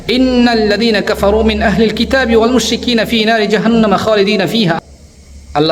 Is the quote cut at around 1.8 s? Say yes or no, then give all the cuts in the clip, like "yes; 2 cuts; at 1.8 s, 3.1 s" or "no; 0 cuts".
no; 1 cut; at 4.8 s